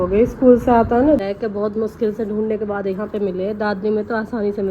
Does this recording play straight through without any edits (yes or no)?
no